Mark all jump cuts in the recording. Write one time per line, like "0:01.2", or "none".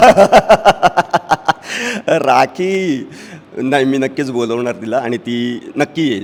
none

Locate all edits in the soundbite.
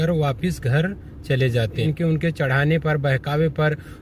0:01.8

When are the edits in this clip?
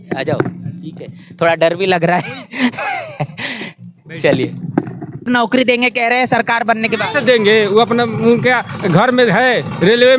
0:05.3

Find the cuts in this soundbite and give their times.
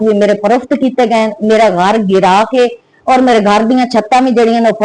none

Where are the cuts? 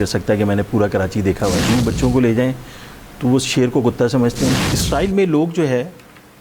0:01.6
0:04.7

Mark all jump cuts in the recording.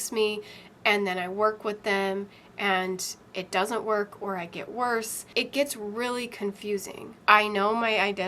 0:05.3
0:07.1

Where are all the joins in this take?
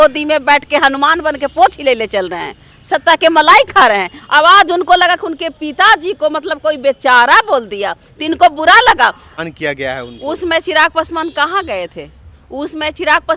0:09.2

